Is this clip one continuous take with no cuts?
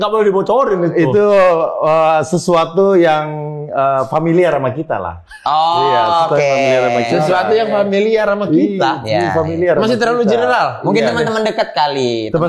yes; 0 cuts

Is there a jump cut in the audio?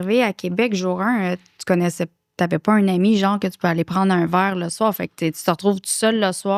no; 0 cuts

